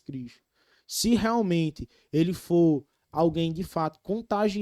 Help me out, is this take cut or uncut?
uncut